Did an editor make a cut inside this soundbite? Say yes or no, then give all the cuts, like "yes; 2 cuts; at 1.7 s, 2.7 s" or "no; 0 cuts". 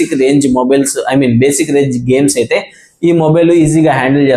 no; 0 cuts